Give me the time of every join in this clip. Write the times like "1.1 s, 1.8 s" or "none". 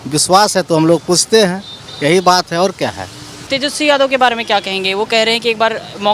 3.4 s